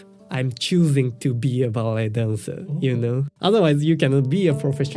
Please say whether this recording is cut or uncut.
cut